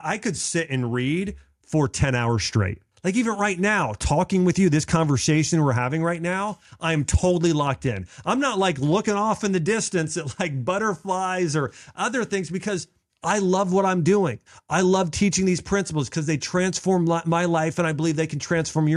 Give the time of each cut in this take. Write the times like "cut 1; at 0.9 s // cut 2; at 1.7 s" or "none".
none